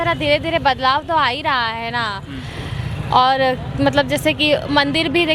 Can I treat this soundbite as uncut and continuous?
yes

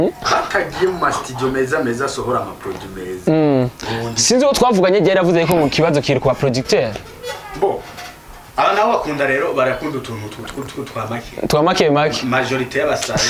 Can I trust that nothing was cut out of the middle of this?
yes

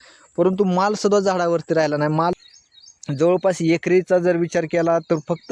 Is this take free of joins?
no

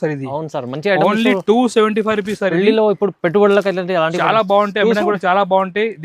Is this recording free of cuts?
yes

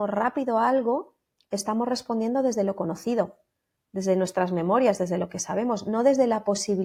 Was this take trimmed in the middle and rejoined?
no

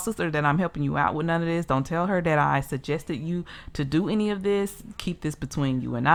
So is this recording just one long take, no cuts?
yes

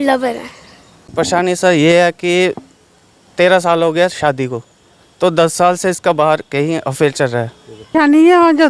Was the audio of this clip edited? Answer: yes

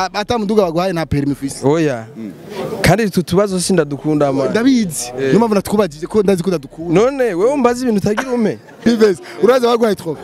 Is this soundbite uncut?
no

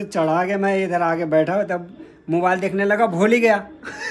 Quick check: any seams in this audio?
no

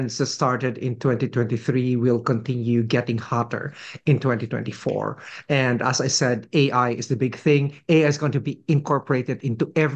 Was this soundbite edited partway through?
no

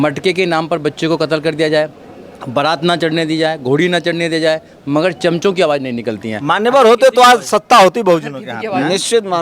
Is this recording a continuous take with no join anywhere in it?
yes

